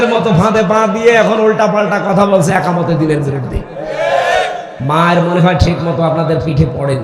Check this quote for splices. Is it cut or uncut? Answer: cut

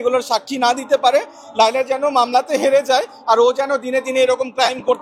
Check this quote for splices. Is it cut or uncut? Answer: uncut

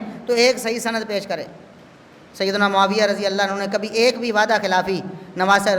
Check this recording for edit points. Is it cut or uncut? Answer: uncut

